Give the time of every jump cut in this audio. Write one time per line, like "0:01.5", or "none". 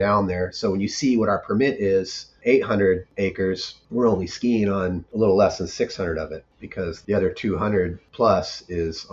none